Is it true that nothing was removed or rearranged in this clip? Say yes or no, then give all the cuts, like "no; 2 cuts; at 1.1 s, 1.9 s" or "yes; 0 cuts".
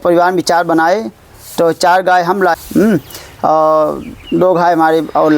no; 1 cut; at 2.6 s